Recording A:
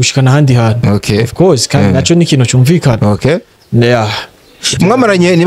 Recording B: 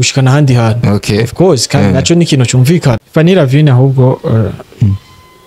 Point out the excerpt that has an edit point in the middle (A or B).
B